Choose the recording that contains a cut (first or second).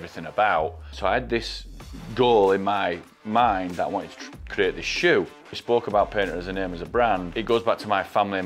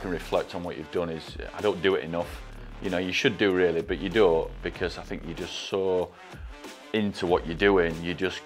first